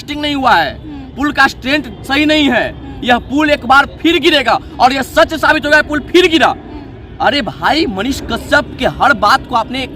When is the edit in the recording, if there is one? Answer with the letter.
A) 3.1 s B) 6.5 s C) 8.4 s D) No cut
D